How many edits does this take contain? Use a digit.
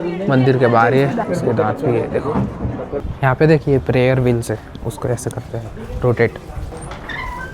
3